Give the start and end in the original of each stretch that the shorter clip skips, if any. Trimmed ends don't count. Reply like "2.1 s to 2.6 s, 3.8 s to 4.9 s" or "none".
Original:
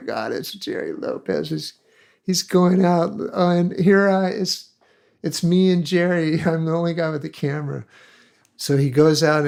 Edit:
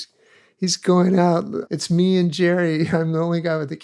3.2 s to 5.1 s

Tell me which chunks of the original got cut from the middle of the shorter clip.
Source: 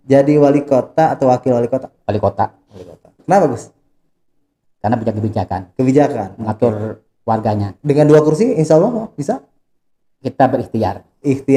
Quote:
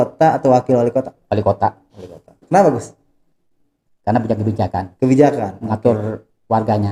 none

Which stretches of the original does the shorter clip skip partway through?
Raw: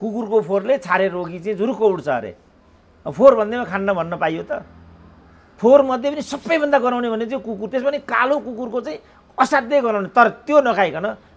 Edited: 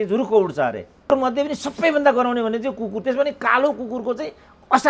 2.6 s to 5.8 s

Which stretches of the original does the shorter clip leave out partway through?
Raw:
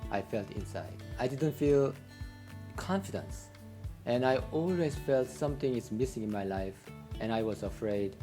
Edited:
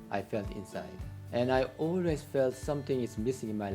1.0 s to 3.7 s

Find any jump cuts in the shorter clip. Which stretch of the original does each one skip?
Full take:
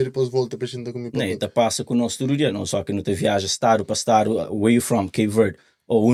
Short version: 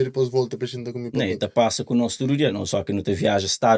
none

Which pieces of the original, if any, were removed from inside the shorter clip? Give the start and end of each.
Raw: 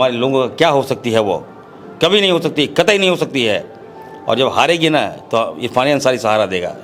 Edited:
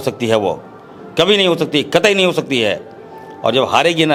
none

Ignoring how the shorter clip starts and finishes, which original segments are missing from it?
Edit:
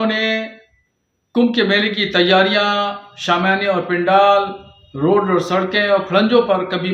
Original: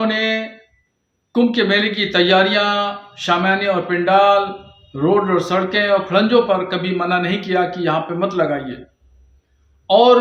none

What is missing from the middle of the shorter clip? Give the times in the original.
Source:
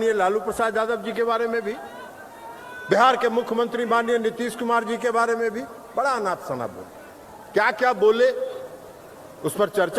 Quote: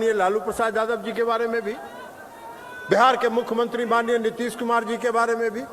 none

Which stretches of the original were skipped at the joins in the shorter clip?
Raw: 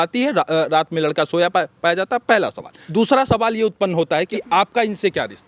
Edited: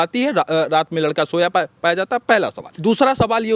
2.6 s to 2.8 s

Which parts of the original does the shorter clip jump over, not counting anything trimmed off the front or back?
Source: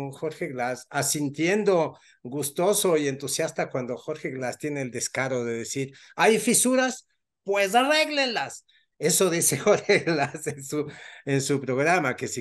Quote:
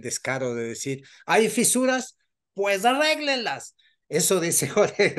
none

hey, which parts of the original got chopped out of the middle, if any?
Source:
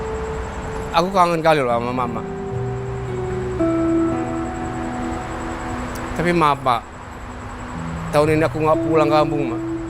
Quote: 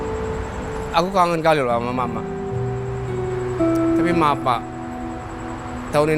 4.1 s to 6.3 s

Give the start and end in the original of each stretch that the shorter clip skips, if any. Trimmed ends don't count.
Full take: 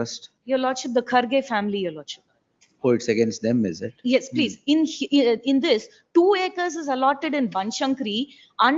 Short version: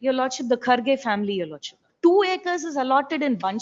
2.3 s to 6.0 s

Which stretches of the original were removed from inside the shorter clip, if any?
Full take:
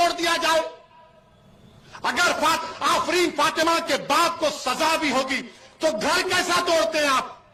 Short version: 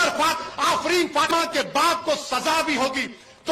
3.5 s to 3.7 s

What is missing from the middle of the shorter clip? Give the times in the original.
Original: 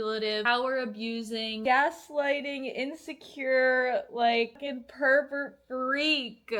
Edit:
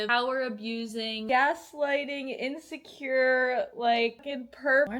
none

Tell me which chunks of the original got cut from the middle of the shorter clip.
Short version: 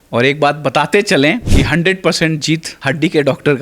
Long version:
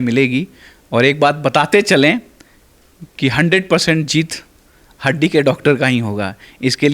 2.3 s to 3.1 s, 4.4 s to 4.9 s

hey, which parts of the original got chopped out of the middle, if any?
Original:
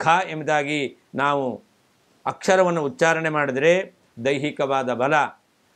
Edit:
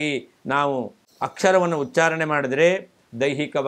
1.7 s to 2.1 s

